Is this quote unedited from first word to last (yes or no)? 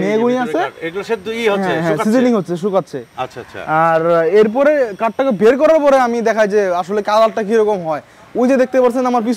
yes